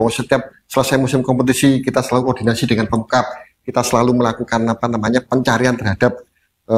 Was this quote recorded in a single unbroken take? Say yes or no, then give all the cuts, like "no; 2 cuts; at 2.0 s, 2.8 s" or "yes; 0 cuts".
yes; 0 cuts